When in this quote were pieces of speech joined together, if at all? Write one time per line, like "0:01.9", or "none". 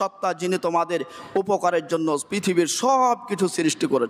none